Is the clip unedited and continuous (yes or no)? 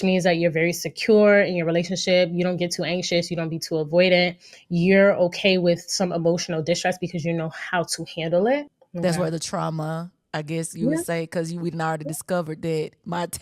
no